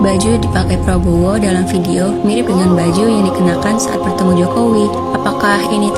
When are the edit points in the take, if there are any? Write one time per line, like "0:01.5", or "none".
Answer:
none